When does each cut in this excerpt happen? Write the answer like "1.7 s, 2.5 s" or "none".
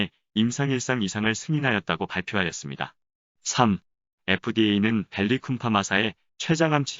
4.5 s